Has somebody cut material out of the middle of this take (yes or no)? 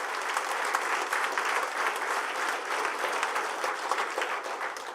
no